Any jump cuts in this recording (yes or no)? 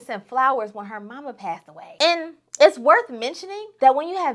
no